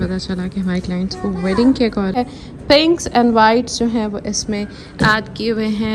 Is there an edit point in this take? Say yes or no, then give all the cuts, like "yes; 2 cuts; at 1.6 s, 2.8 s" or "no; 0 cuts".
yes; 1 cut; at 2.1 s